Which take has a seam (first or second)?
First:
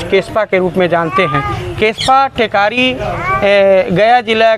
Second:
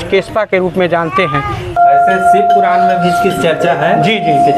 second